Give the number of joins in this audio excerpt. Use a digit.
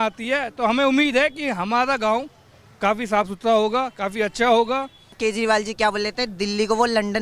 1